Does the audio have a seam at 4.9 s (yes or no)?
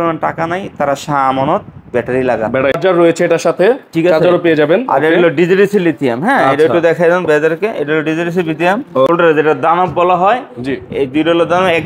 no